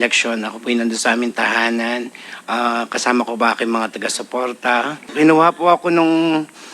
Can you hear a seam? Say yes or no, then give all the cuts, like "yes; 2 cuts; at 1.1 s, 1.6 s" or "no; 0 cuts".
yes; 1 cut; at 5.1 s